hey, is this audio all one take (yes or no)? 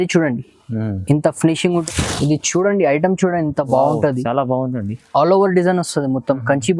no